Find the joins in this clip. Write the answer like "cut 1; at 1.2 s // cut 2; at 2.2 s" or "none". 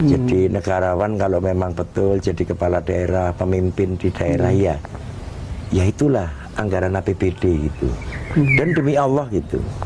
none